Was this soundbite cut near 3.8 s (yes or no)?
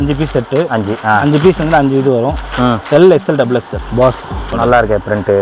yes